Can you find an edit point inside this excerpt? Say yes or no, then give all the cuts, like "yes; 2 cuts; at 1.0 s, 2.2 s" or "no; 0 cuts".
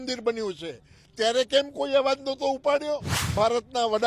yes; 1 cut; at 3.2 s